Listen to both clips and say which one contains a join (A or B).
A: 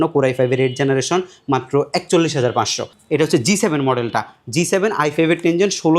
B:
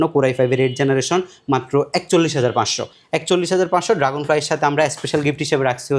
A